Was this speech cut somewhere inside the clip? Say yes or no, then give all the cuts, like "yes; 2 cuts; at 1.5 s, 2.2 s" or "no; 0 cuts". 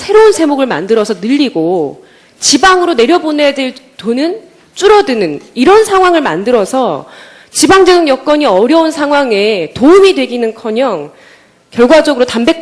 no; 0 cuts